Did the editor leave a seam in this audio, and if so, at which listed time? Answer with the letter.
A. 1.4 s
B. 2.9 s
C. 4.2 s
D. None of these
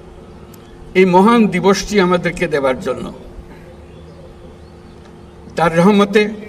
D